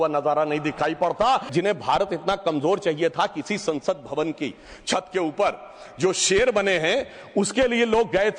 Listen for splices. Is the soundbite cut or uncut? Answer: cut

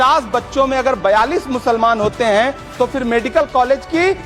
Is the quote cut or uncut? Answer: uncut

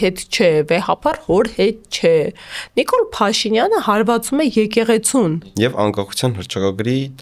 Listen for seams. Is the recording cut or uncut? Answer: cut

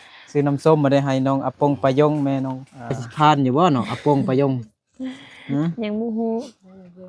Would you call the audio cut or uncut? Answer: cut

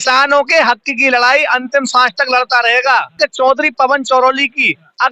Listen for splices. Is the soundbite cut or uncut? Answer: cut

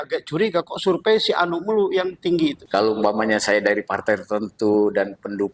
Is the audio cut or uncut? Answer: cut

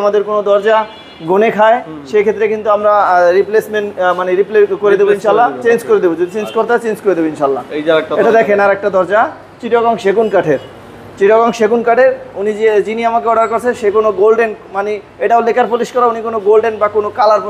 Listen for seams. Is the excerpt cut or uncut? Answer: uncut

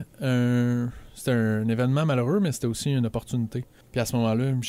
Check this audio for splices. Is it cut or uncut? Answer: cut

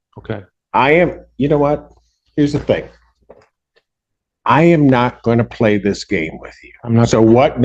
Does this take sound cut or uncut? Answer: uncut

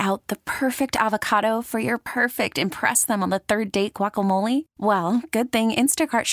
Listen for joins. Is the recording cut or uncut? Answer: uncut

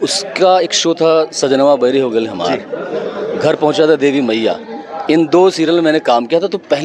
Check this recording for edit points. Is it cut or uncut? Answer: uncut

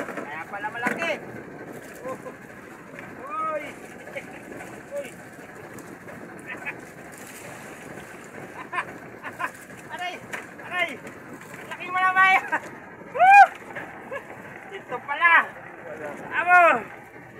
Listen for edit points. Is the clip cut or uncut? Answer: uncut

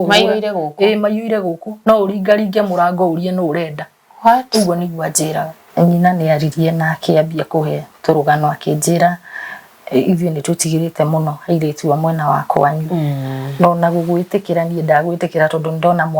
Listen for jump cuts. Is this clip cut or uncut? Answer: cut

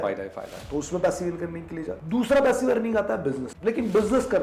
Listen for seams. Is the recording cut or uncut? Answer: cut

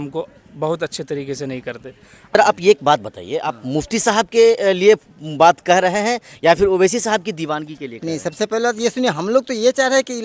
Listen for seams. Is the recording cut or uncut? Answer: cut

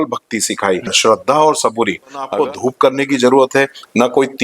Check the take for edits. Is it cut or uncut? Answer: cut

